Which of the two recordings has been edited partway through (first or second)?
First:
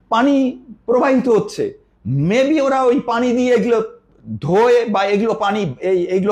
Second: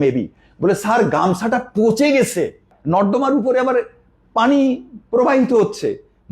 second